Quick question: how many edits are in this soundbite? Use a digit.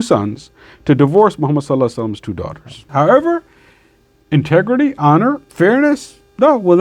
2